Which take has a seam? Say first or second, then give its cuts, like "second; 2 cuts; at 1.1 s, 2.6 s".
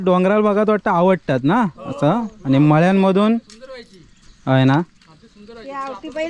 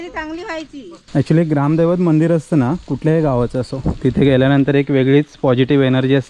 second; 1 cut; at 1.0 s